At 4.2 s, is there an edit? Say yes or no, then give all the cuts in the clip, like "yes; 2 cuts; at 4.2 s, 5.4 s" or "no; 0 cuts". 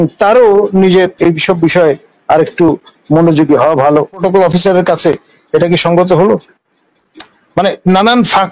yes; 1 cut; at 4.2 s